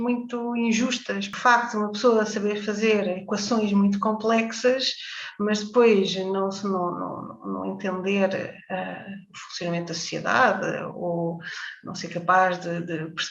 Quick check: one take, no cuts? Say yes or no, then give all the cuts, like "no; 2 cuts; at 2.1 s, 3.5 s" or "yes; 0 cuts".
no; 1 cut; at 1.3 s